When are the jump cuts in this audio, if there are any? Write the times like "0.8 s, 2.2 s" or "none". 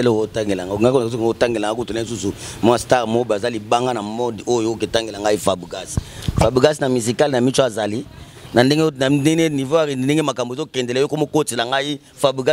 none